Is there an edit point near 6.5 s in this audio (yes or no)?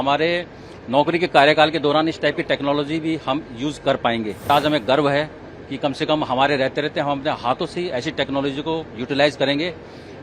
no